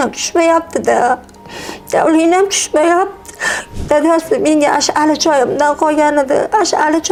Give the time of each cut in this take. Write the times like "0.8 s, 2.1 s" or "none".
none